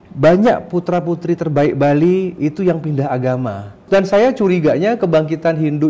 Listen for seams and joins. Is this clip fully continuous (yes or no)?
no